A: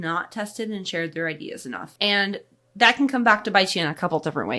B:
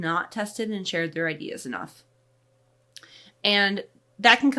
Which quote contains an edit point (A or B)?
A